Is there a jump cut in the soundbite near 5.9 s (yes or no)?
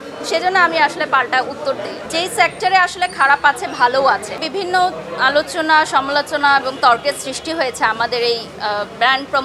no